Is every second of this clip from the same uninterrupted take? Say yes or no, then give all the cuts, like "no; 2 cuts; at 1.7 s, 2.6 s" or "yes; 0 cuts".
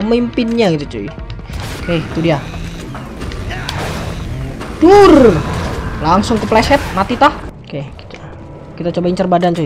no; 2 cuts; at 1.7 s, 7.5 s